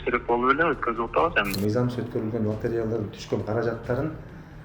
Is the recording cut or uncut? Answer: cut